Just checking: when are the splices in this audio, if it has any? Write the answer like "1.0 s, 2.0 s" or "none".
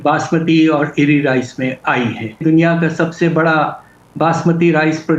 2.4 s